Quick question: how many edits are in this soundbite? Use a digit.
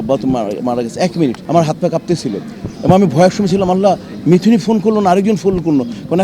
1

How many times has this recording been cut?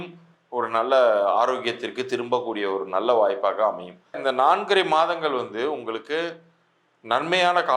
1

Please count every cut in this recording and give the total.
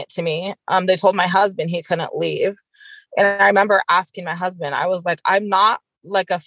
0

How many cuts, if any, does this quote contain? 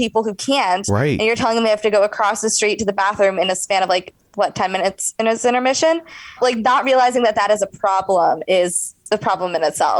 1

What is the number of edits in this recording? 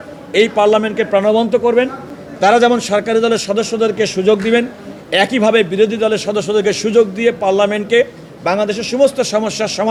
0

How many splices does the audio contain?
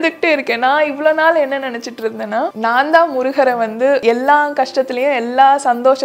2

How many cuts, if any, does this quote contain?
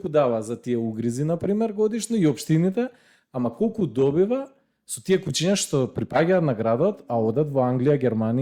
0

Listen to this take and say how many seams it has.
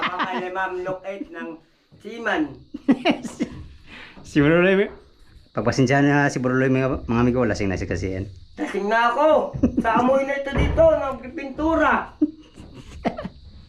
0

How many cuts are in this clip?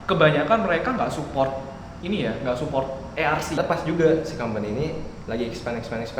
1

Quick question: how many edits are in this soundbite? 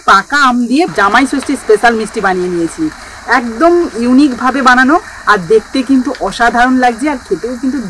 1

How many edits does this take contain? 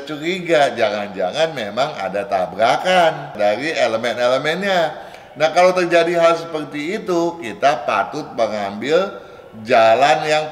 1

